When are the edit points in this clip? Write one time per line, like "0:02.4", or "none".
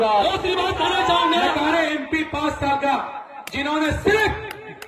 0:01.5